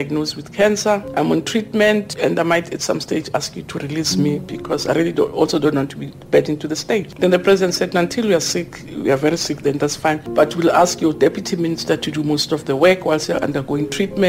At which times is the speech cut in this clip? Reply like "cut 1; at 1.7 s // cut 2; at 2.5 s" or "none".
cut 1; at 1.1 s // cut 2; at 2.1 s // cut 3; at 7.1 s // cut 4; at 10.2 s